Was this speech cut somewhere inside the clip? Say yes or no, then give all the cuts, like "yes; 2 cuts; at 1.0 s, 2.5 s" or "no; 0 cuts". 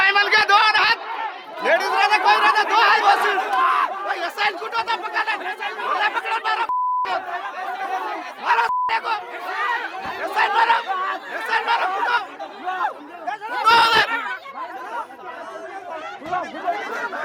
no; 0 cuts